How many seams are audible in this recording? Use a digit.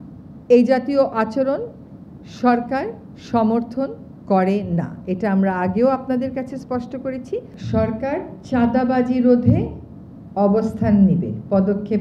1